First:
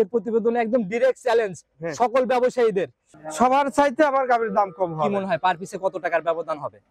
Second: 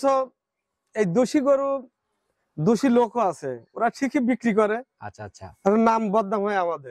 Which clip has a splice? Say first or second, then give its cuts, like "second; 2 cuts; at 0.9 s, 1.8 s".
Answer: first; 1 cut; at 3.0 s